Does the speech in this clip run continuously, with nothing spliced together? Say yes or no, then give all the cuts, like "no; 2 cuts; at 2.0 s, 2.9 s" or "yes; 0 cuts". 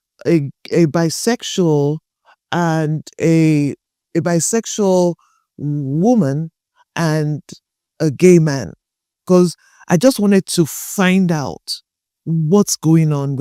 yes; 0 cuts